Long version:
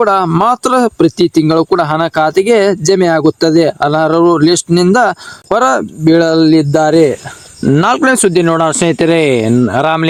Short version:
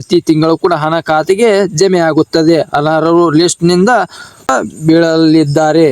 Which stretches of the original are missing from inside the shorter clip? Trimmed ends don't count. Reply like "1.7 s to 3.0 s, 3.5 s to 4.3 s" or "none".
5.5 s to 5.6 s